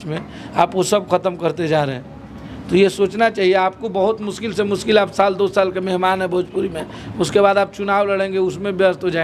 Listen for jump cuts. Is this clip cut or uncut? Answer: uncut